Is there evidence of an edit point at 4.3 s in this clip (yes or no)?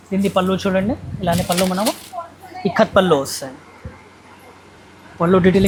no